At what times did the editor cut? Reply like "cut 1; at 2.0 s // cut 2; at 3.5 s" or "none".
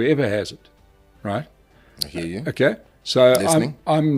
none